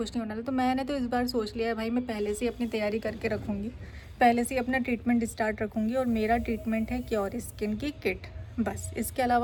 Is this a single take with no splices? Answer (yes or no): yes